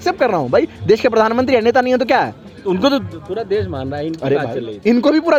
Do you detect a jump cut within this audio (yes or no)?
no